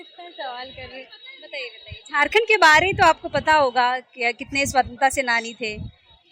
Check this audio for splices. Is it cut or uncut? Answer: uncut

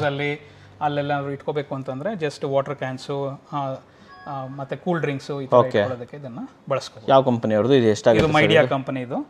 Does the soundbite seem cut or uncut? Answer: uncut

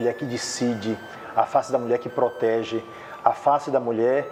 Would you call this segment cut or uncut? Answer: uncut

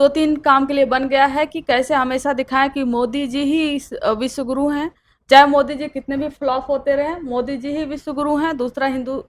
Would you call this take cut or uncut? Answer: uncut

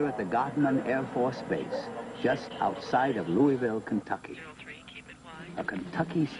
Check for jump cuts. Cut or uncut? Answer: uncut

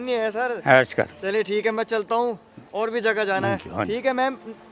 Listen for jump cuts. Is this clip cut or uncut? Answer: uncut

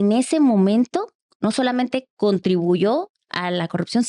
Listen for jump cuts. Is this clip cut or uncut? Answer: uncut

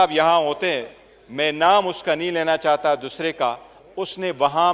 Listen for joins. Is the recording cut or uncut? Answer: uncut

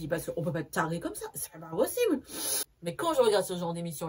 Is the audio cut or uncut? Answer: cut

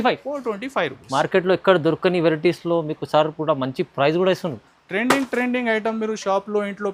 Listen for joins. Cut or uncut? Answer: uncut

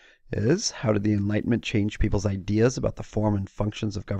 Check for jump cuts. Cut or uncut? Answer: uncut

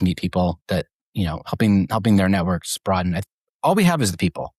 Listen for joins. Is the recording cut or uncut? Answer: cut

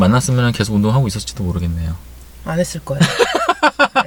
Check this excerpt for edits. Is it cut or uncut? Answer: uncut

